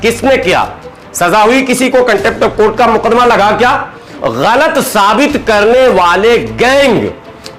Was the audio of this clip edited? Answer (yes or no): yes